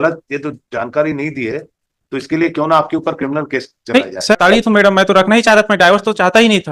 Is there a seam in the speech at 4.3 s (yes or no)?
yes